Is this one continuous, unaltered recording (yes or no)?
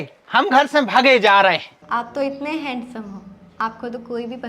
no